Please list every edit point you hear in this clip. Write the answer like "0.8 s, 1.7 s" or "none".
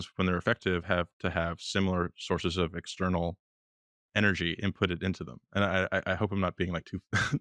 none